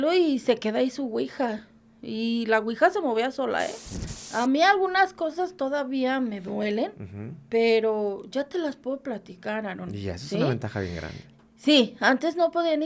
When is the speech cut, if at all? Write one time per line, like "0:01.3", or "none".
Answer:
0:04.1